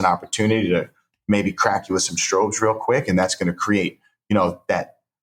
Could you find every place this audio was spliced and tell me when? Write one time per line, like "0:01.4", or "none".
none